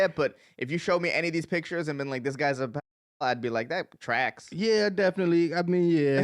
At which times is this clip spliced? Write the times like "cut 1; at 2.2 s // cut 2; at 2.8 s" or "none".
none